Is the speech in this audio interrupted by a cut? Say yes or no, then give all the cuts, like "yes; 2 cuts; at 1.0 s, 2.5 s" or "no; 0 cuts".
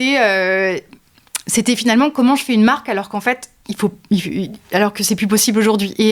no; 0 cuts